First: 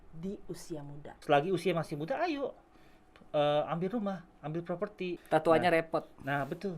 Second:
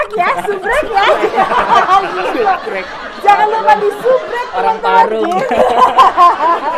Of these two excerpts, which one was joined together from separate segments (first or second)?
first